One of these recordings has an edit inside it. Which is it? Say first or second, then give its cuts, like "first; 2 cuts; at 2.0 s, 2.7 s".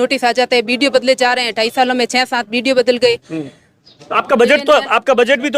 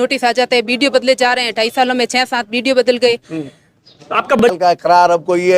second; 1 cut; at 4.4 s